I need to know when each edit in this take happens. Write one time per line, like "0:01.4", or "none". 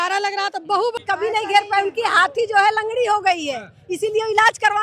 0:01.0